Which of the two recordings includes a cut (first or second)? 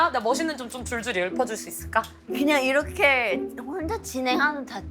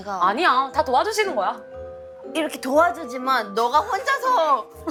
first